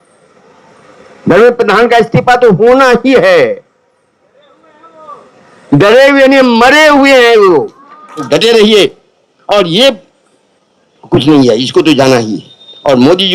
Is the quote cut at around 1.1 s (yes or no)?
no